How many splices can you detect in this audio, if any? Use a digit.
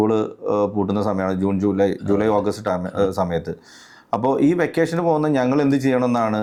0